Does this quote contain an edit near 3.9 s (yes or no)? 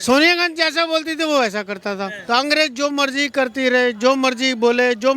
no